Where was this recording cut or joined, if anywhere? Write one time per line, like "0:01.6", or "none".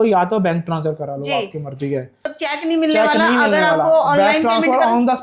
0:02.3